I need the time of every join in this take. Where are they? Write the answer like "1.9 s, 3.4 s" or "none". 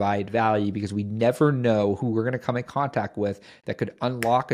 none